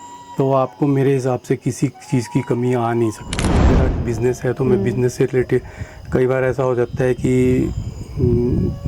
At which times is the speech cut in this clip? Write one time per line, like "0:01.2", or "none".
0:03.8